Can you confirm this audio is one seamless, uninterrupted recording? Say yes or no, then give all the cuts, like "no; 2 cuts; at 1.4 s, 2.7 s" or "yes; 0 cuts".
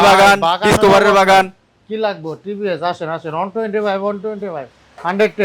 yes; 0 cuts